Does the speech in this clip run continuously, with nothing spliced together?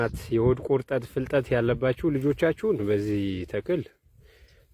yes; 0 cuts

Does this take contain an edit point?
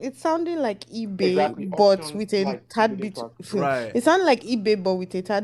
no; 0 cuts

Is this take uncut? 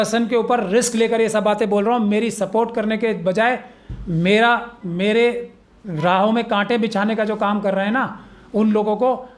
yes; 0 cuts

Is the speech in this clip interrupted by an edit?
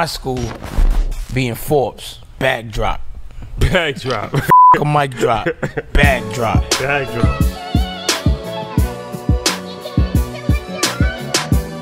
no; 0 cuts

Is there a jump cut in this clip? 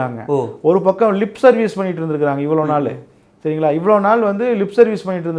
no; 0 cuts

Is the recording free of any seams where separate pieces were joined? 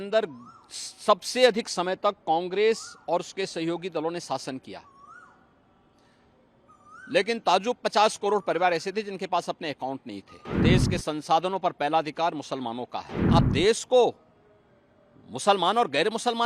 no; 2 cuts; at 10.6 s, 13.2 s

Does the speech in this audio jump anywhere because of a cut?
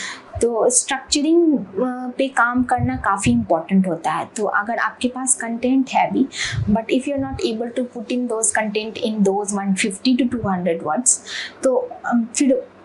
no; 0 cuts

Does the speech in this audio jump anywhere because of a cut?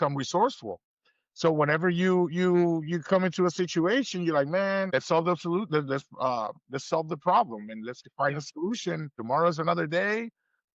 yes; 2 cuts; at 4.9 s, 9.1 s

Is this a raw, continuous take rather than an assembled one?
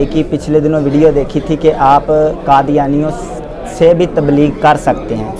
yes; 0 cuts

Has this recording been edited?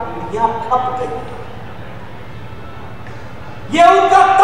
no; 0 cuts

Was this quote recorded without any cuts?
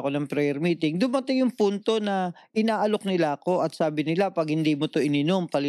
yes; 0 cuts

